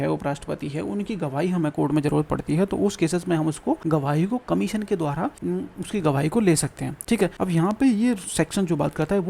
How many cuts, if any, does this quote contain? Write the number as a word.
three